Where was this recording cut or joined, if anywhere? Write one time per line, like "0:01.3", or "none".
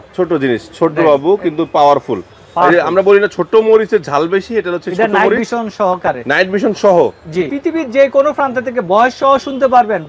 0:07.5